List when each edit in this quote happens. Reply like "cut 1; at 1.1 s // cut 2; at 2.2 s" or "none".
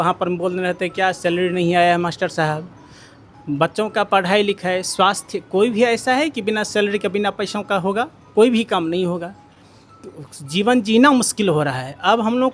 none